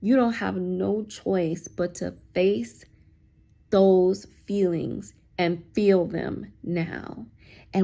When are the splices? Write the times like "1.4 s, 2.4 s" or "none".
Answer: none